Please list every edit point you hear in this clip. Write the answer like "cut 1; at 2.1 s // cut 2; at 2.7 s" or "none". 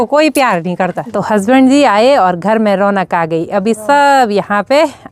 cut 1; at 1.1 s